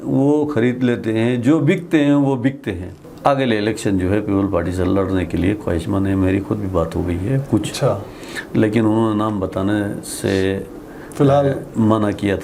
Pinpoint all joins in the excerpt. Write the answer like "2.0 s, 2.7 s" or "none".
3.0 s

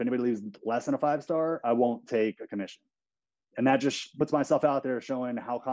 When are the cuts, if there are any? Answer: 4.1 s

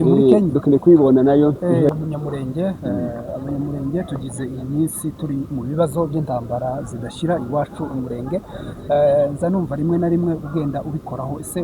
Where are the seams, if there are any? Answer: 1.9 s

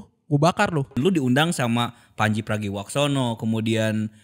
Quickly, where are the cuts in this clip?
1.0 s

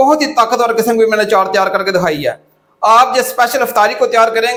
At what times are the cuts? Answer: none

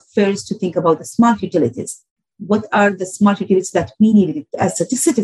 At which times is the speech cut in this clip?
none

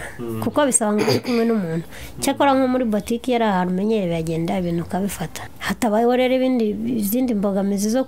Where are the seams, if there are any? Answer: 5.5 s

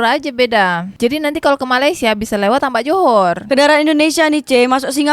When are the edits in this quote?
none

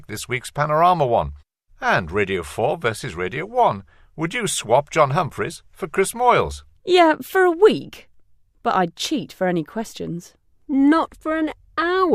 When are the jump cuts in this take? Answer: 9.0 s

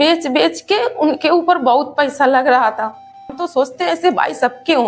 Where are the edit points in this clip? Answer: 3.3 s

